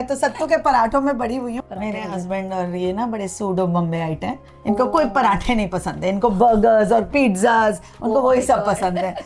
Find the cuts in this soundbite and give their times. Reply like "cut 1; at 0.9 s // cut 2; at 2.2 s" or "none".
cut 1; at 1.5 s